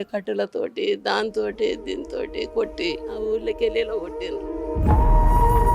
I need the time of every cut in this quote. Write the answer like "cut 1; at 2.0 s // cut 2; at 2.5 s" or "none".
cut 1; at 3.1 s